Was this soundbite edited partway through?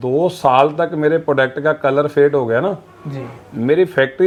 no; 0 cuts

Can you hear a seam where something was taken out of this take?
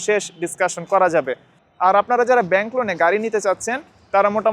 no; 0 cuts

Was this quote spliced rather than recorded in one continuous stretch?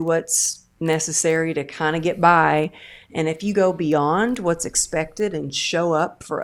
no; 0 cuts

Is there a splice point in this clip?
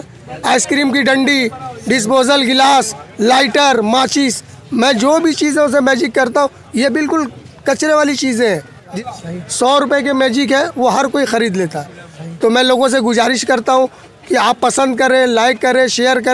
no; 0 cuts

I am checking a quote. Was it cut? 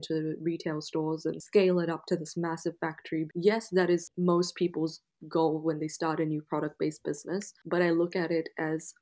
yes; 4 cuts; at 1.4 s, 3.3 s, 4.1 s, 7.5 s

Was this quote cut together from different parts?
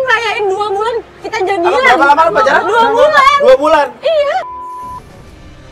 no; 0 cuts

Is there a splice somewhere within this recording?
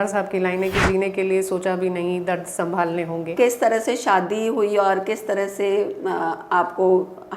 yes; 1 cut; at 3.3 s

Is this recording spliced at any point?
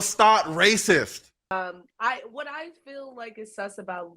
yes; 1 cut; at 1.5 s

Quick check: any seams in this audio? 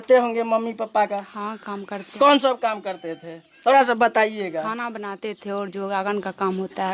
no; 0 cuts

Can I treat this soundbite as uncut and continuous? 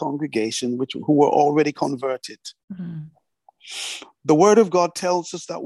yes; 0 cuts

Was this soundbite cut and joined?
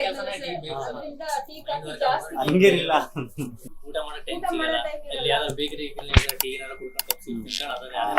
yes; 1 cut; at 3.8 s

